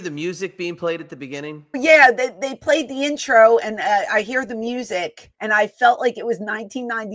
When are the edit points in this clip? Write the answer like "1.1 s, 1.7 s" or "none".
1.8 s, 5.2 s